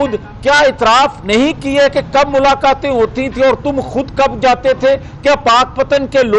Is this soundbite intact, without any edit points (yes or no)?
yes